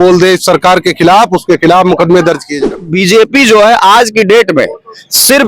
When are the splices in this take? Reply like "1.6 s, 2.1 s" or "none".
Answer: 2.8 s